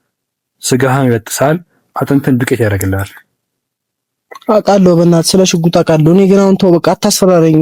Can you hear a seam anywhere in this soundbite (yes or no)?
no